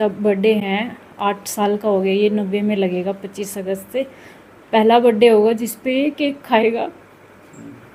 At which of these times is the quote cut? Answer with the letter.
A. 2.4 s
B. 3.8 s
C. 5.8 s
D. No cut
D